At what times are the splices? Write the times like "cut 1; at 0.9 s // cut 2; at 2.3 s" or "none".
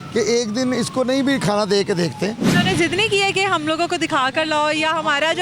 cut 1; at 2.5 s